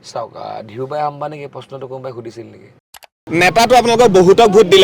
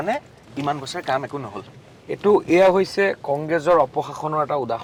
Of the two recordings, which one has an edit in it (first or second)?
first